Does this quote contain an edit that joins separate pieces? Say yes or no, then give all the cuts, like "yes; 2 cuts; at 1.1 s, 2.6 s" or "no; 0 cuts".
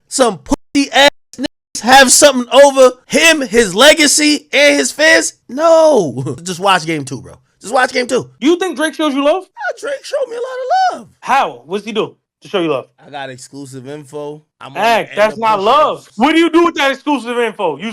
yes; 2 cuts; at 8.3 s, 16.0 s